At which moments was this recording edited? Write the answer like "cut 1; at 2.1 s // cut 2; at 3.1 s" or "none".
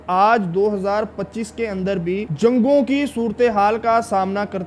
cut 1; at 2.3 s